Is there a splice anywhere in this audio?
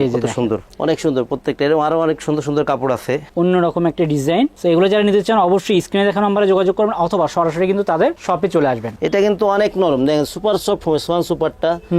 yes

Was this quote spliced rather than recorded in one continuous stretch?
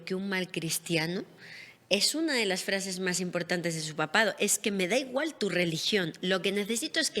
no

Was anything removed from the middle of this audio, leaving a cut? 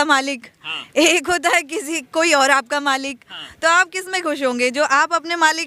no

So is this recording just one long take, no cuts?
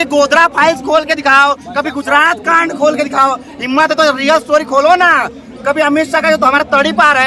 yes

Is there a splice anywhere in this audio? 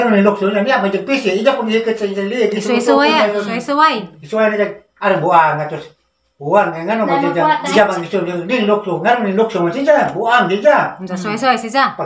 yes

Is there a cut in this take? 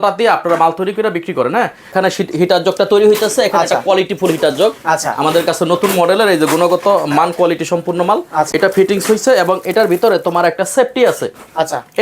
yes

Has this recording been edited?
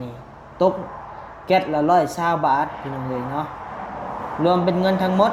no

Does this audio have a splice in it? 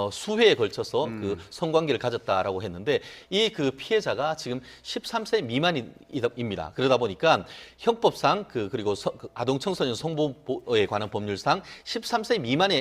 yes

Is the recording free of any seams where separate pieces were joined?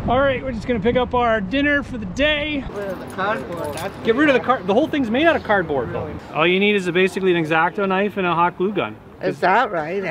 no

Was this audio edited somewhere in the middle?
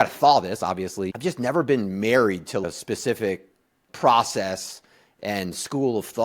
yes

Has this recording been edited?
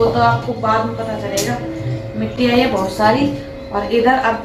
no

